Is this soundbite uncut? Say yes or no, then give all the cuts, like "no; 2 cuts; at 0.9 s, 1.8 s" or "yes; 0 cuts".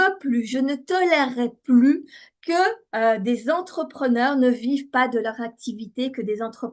yes; 0 cuts